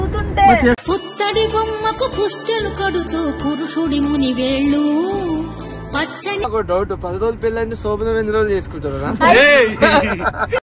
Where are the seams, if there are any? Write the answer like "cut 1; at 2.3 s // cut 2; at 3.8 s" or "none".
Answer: cut 1; at 6.4 s

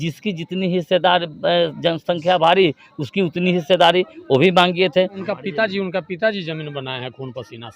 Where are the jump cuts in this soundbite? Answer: cut 1; at 5.3 s

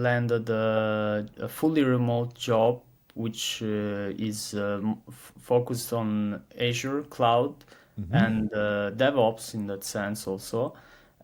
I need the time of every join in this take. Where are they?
none

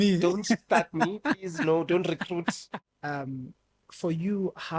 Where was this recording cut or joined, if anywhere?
cut 1; at 2.7 s

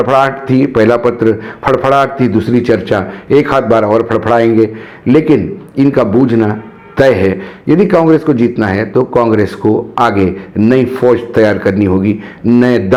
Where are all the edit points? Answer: none

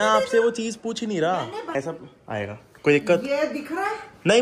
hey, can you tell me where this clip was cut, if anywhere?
cut 1; at 1.7 s

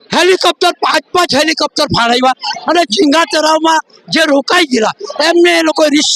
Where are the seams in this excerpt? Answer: none

